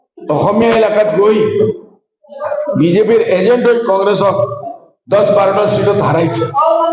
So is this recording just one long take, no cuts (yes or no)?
yes